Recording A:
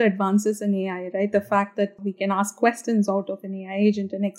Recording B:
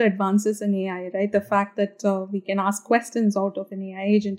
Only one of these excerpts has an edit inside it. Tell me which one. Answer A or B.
A